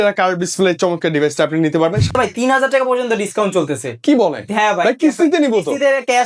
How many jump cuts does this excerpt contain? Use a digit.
1